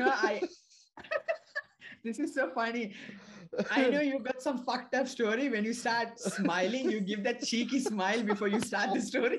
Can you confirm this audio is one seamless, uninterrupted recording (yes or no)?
yes